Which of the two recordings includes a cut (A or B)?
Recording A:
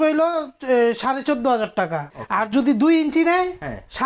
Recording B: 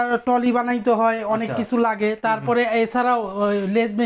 A